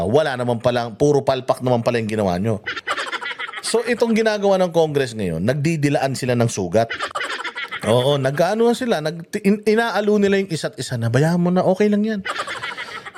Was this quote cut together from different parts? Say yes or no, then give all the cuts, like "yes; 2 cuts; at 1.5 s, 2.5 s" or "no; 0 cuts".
no; 0 cuts